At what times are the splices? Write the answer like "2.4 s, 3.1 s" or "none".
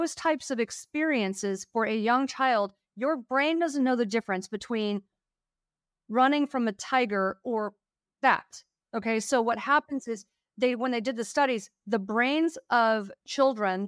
none

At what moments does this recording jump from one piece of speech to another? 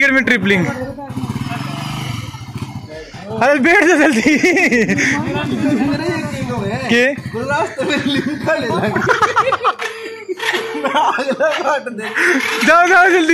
none

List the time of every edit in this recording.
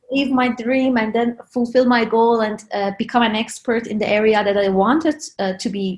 none

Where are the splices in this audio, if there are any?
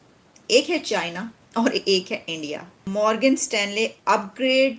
2.8 s

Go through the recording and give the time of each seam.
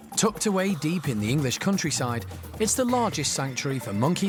none

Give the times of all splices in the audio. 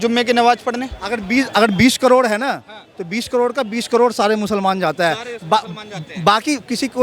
none

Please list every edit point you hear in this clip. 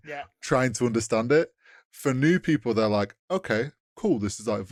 none

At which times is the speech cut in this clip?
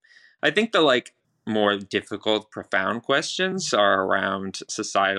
1.2 s

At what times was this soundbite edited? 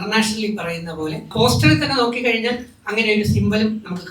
1.3 s

